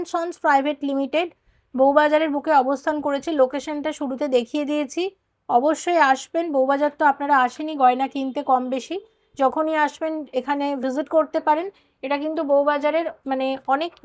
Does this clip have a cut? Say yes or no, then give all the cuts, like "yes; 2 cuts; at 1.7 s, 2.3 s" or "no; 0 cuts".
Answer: no; 0 cuts